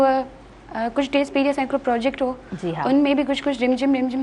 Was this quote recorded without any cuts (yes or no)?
yes